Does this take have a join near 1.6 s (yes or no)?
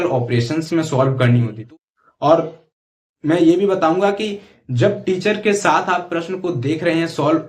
yes